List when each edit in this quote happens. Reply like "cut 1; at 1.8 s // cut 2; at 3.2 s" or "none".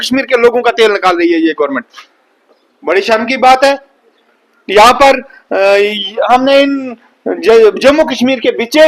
none